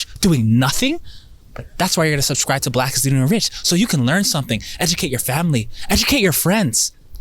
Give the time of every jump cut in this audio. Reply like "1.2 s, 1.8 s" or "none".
none